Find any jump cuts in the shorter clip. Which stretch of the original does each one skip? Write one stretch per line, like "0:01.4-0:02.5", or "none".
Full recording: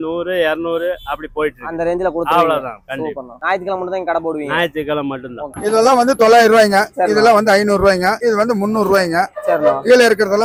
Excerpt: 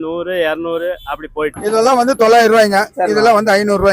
0:01.6-0:05.6